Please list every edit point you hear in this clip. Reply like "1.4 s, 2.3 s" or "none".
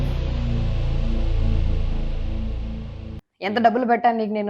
3.2 s